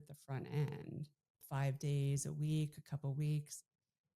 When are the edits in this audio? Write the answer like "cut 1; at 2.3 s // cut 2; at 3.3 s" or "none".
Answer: cut 1; at 1.4 s